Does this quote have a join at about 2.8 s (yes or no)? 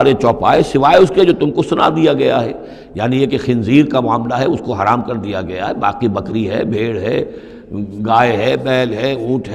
no